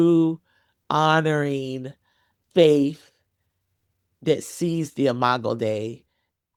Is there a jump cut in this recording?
no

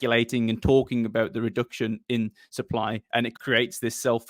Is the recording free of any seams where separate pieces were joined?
yes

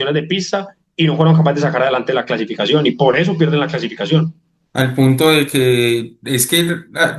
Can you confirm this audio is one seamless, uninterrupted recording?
yes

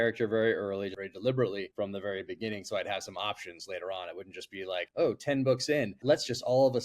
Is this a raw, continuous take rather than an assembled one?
no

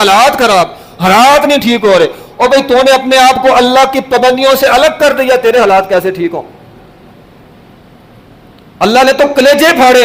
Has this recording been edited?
no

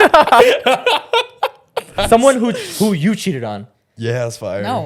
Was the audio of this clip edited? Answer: yes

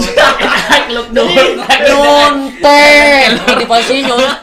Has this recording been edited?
no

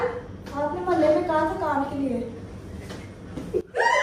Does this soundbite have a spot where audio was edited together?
no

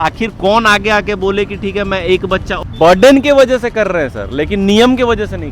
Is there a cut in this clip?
yes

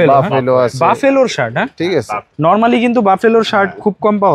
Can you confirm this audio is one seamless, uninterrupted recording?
yes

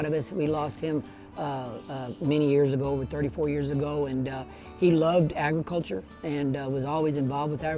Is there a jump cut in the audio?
no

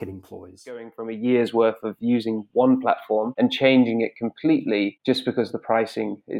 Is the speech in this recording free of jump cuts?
no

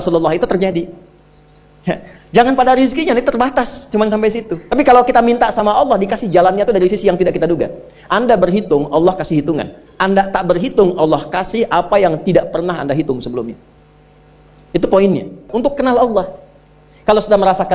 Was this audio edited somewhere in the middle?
yes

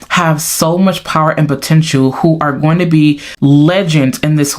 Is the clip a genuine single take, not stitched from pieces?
yes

